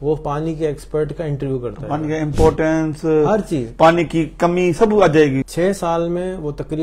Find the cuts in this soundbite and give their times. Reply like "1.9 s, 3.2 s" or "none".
5.5 s